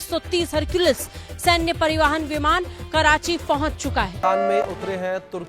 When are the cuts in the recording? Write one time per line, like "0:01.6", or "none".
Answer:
0:04.1